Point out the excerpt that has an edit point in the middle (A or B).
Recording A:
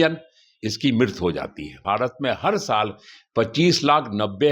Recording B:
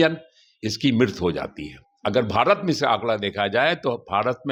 A